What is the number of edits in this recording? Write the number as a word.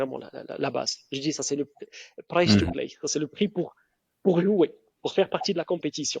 zero